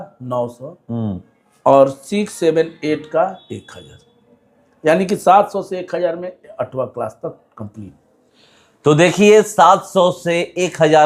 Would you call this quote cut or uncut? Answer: uncut